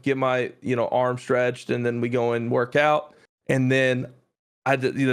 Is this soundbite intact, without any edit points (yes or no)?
yes